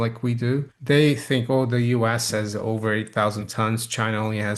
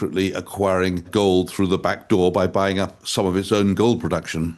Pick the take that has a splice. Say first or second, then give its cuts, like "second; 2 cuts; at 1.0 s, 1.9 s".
second; 1 cut; at 1.0 s